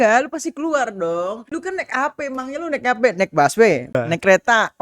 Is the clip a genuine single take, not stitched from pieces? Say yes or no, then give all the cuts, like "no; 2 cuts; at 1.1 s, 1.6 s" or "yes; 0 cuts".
no; 2 cuts; at 1.4 s, 4.0 s